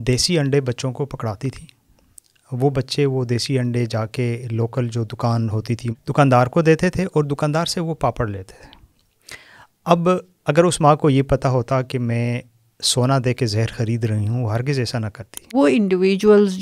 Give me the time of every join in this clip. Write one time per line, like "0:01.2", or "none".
0:05.9
0:15.5